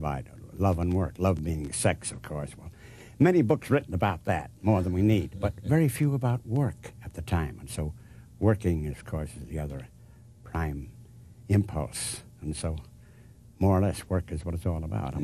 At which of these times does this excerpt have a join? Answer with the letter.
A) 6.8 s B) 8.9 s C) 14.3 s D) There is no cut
D